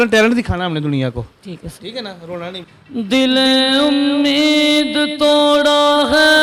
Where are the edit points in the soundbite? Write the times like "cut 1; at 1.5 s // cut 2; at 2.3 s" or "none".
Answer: cut 1; at 2.6 s